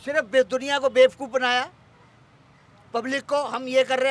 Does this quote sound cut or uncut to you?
uncut